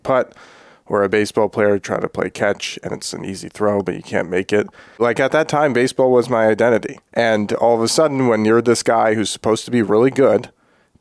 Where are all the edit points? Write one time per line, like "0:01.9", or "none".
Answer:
0:05.0
0:07.0